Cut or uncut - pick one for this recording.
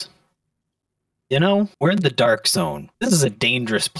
cut